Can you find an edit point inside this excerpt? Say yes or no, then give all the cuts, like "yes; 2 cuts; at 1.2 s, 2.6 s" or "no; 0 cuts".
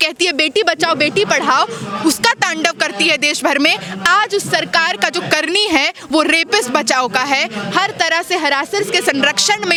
no; 0 cuts